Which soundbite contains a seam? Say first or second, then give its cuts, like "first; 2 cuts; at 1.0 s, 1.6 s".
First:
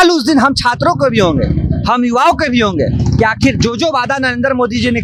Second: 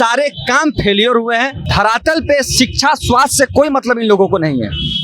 second; 1 cut; at 1.6 s